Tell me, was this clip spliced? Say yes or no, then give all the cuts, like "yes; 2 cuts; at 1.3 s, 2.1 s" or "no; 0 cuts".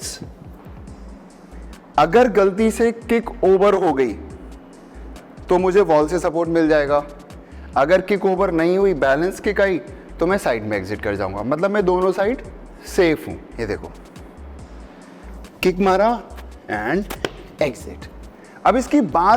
yes; 1 cut; at 13.5 s